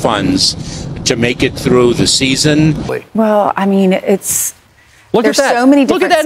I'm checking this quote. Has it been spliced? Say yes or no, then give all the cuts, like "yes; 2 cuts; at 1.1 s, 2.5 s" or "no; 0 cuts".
yes; 1 cut; at 3.0 s